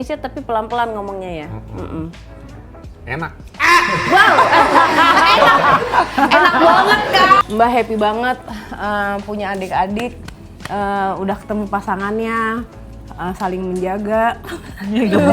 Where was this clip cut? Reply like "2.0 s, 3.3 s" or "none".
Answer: 7.4 s